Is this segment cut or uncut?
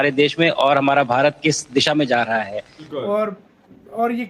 cut